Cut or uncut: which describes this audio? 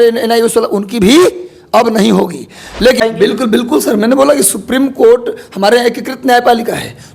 cut